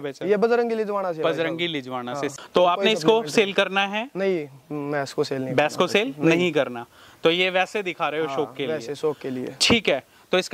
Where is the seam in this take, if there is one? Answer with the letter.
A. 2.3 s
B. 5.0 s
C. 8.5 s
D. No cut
A